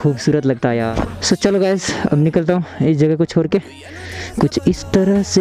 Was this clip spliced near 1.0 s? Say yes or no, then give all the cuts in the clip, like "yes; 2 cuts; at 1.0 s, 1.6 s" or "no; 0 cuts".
yes; 1 cut; at 1.0 s